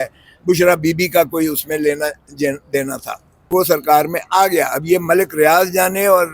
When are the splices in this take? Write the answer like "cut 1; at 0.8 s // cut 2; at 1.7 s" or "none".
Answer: cut 1; at 3.5 s